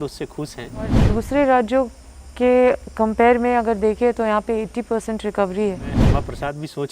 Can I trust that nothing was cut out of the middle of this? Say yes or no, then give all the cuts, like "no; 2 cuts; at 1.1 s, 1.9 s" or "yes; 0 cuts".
no; 2 cuts; at 1.0 s, 6.0 s